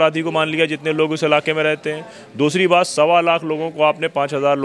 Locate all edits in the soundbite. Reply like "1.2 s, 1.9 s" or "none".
none